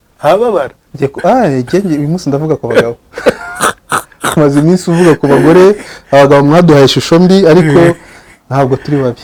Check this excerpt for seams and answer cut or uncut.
uncut